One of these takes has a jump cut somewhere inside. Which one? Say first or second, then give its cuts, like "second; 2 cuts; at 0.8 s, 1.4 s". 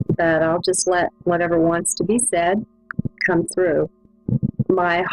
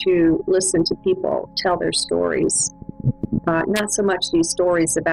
first; 1 cut; at 1.9 s